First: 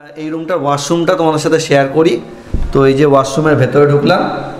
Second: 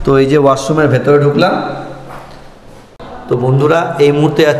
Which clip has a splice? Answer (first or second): second